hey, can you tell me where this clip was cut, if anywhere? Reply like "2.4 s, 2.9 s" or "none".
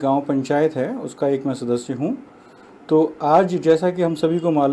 3.6 s